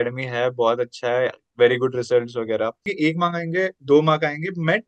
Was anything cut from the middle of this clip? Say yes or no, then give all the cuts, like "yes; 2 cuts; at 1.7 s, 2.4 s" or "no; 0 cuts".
yes; 1 cut; at 2.8 s